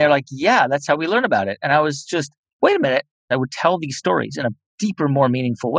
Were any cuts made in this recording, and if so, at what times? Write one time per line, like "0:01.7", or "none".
0:02.4
0:03.3